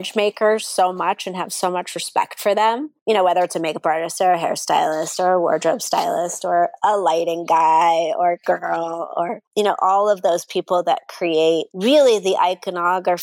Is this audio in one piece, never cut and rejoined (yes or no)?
yes